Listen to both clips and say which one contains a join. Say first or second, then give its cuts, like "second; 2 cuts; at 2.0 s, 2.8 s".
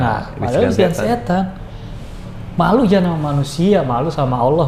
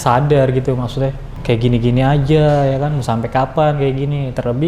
second; 1 cut; at 1.3 s